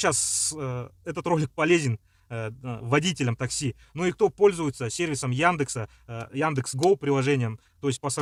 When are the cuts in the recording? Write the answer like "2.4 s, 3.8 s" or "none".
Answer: none